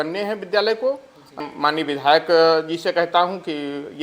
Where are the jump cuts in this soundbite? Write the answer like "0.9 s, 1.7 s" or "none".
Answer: 1.4 s